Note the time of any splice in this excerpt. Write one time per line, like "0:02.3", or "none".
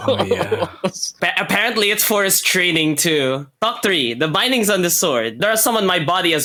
none